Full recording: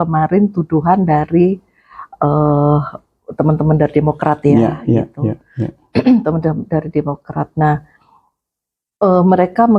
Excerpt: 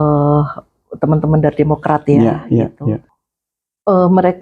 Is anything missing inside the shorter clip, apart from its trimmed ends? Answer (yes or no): yes